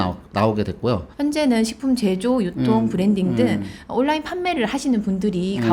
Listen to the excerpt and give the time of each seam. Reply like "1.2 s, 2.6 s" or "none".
1.1 s